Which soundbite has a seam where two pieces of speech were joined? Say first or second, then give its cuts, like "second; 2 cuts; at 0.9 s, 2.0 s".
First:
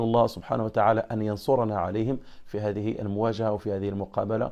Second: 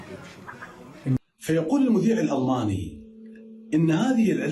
second; 1 cut; at 1.2 s